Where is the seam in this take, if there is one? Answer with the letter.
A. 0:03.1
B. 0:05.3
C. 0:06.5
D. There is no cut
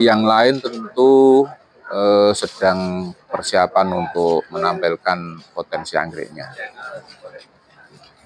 D